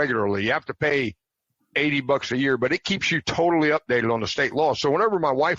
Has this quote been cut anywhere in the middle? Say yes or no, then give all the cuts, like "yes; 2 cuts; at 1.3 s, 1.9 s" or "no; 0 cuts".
no; 0 cuts